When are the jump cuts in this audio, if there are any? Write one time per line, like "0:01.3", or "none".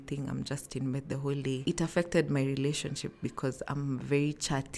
0:01.6